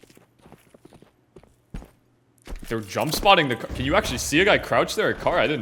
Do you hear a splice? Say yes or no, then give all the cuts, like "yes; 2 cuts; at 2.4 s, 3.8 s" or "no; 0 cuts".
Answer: no; 0 cuts